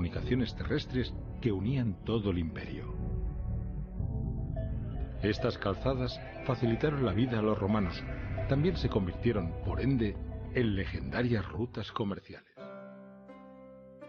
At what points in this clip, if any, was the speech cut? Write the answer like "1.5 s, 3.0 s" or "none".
3.4 s